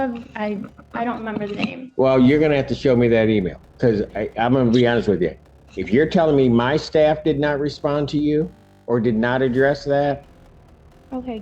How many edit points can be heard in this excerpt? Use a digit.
0